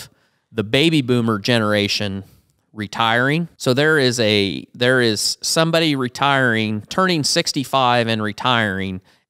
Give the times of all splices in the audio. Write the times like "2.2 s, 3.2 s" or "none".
3.5 s